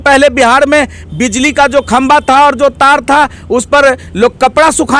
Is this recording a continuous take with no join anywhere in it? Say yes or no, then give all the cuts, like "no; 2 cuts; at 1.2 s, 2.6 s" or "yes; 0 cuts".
yes; 0 cuts